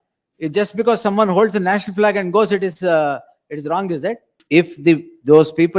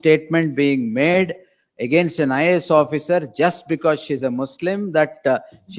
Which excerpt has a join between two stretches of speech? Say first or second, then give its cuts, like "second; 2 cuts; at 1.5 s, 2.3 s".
first; 1 cut; at 4.3 s